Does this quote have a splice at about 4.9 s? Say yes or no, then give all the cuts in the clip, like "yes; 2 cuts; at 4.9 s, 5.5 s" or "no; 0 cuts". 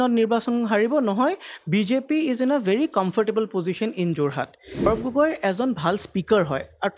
yes; 1 cut; at 4.9 s